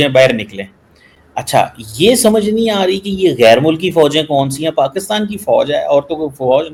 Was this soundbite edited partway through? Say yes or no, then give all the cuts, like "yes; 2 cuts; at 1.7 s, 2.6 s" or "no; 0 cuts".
no; 0 cuts